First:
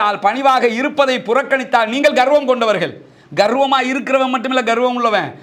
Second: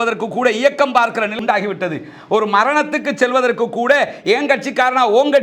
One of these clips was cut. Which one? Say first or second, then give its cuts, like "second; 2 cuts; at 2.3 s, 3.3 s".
second; 1 cut; at 1.4 s